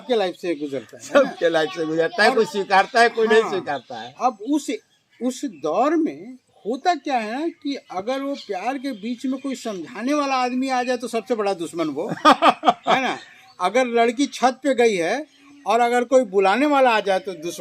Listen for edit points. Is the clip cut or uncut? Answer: uncut